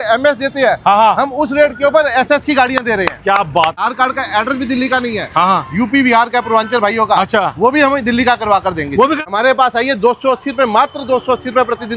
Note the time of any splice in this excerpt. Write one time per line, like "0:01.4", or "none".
0:03.8
0:09.2